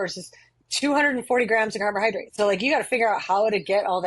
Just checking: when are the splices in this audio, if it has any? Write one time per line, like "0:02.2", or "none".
0:02.3